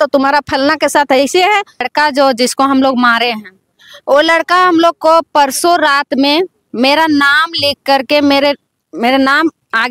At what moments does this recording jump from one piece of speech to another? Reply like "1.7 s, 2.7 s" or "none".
1.9 s